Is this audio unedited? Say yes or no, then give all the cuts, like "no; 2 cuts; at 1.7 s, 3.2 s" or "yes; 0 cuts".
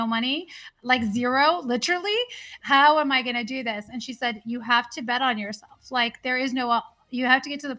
yes; 0 cuts